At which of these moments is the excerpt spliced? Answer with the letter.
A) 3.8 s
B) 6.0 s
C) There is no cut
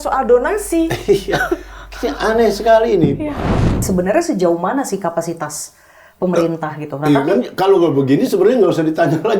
A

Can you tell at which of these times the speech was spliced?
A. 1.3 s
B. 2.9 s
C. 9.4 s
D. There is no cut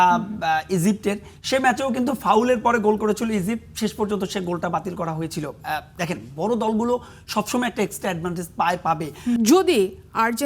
C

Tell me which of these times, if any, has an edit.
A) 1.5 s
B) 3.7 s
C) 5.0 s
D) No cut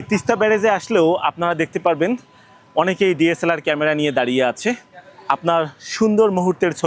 D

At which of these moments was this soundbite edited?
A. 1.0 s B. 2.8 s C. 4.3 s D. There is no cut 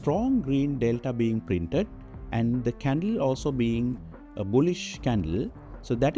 D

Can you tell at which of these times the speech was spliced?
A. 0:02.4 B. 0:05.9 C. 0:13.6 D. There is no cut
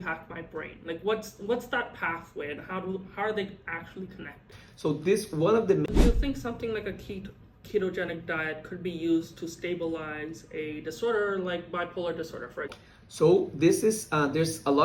B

